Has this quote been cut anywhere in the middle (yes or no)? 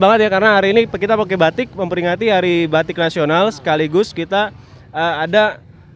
no